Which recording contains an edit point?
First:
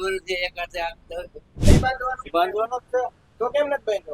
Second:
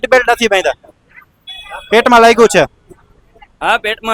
first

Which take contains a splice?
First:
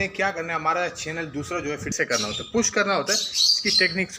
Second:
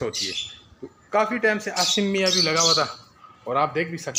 first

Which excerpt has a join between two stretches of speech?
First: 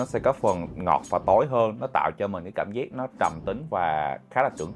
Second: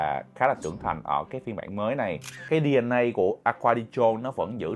second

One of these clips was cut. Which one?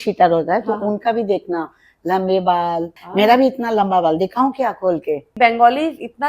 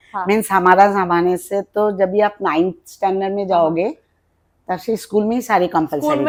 first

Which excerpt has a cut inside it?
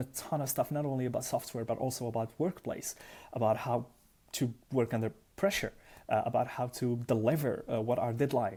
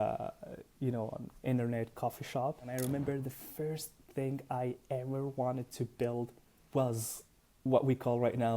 second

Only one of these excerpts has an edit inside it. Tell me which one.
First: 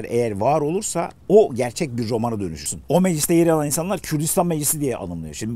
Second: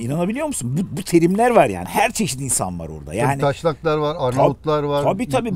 first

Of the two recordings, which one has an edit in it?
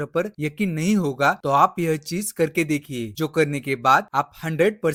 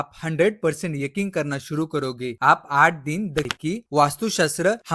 second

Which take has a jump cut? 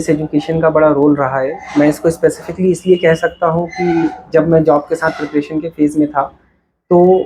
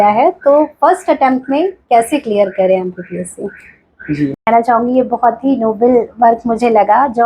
second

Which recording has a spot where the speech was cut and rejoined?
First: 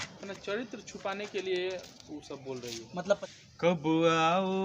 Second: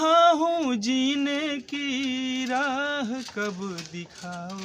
first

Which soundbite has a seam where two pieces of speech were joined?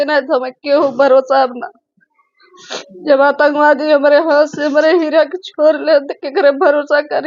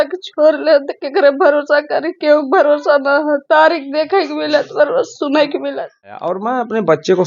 second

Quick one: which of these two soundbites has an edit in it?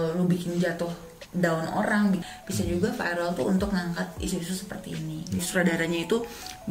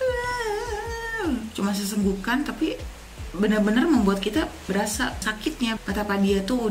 first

